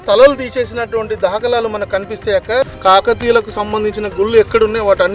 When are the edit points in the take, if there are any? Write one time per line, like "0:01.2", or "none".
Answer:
0:02.7